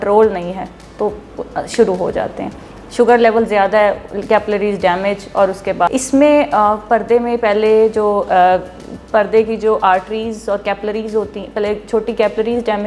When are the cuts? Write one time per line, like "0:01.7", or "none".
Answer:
0:05.9